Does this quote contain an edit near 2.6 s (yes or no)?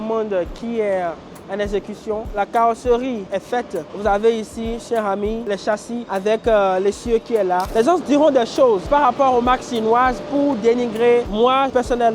no